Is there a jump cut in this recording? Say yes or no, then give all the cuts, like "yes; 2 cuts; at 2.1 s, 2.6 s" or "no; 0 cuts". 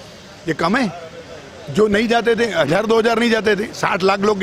no; 0 cuts